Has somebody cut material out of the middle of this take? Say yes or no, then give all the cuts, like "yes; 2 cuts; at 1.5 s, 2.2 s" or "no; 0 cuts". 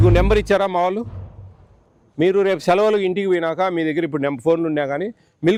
no; 0 cuts